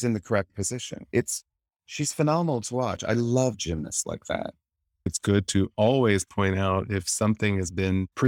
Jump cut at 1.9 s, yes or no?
no